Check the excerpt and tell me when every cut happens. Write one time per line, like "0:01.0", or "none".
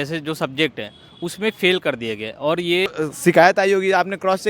0:02.9